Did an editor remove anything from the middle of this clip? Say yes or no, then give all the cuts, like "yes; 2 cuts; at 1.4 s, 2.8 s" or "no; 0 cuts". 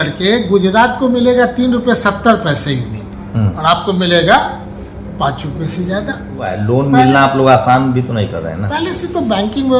yes; 1 cut; at 6.5 s